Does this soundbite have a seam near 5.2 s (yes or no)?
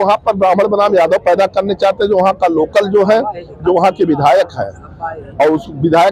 no